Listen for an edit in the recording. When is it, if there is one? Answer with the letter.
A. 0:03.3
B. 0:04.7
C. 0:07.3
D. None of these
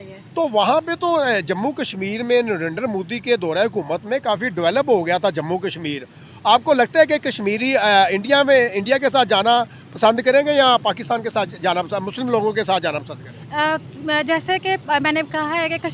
D